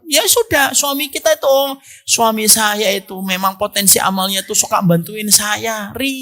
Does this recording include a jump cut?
no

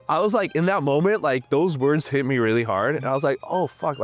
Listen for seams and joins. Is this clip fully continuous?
yes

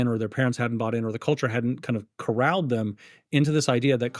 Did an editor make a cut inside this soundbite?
no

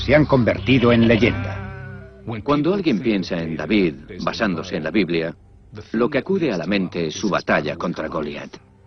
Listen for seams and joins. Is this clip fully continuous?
yes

